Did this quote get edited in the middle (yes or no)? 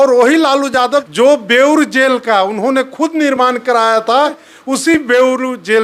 yes